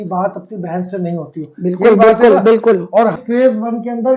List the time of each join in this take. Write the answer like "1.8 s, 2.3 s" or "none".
3.2 s